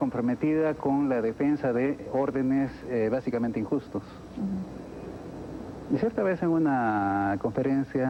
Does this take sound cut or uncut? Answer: uncut